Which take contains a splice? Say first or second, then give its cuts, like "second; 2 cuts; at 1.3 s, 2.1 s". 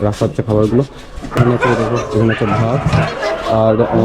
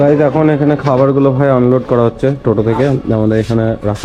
first; 1 cut; at 1.2 s